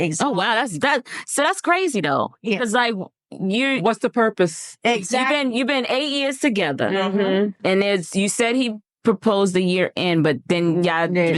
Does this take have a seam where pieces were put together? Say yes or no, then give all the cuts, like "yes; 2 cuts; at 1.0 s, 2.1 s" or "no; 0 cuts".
no; 0 cuts